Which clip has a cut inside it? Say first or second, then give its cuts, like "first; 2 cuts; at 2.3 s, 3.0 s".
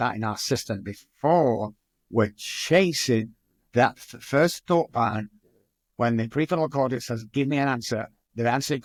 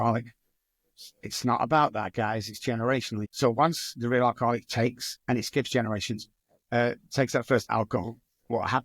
second; 1 cut; at 3.3 s